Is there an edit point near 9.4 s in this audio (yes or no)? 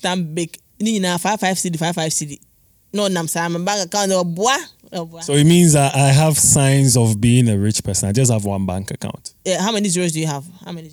yes